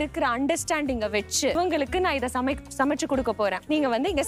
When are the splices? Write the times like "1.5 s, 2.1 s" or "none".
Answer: none